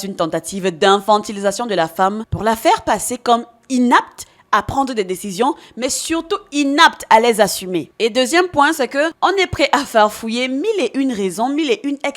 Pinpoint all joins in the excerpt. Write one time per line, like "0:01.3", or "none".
0:02.3
0:09.1